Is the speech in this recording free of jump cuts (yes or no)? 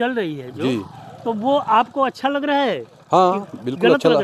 yes